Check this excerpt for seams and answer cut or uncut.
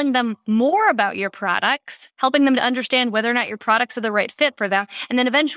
uncut